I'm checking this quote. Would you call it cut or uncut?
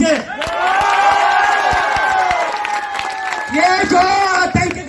uncut